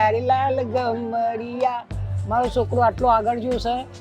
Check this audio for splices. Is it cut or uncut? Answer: cut